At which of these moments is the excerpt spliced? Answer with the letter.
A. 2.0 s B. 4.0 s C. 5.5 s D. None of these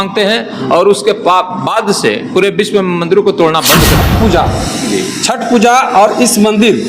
B